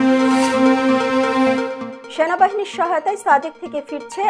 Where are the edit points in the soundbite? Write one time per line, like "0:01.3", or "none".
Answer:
none